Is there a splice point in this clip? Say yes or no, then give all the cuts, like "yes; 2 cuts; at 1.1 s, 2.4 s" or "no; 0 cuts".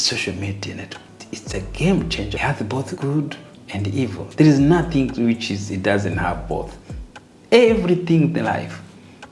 yes; 2 cuts; at 1.1 s, 2.5 s